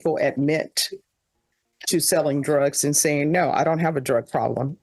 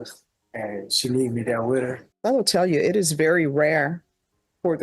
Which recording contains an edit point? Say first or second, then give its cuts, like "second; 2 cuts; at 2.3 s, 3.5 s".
second; 1 cut; at 2.1 s